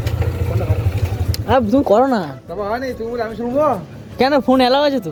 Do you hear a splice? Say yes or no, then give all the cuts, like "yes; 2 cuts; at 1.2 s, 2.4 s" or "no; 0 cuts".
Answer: no; 0 cuts